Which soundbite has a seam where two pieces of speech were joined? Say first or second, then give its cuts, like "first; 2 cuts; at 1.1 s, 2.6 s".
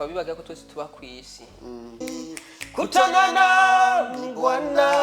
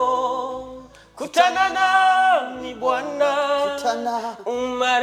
first; 1 cut; at 2.0 s